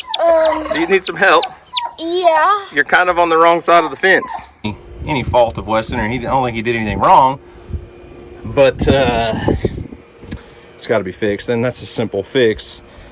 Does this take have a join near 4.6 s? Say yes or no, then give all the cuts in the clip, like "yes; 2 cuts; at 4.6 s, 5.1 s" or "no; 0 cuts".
yes; 1 cut; at 4.6 s